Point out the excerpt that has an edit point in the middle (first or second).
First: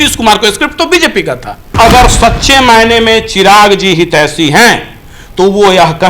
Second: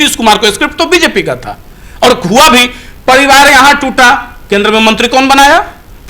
first